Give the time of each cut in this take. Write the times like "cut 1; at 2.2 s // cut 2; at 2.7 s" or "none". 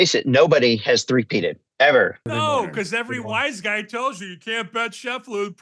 cut 1; at 2.2 s